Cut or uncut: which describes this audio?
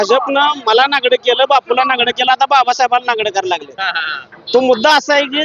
uncut